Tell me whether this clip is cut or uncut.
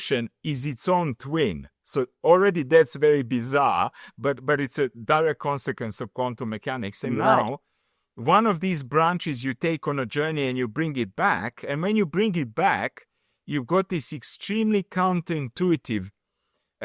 uncut